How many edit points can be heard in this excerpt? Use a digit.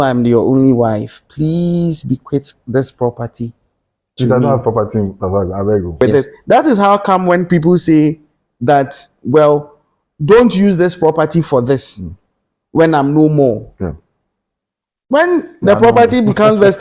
1